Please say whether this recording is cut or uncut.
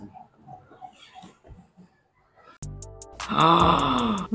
cut